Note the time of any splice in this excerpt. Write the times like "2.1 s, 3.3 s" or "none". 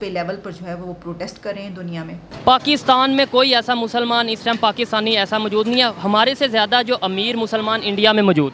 2.3 s